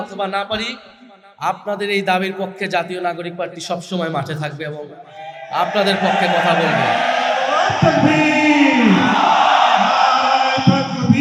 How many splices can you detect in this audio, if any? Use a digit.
0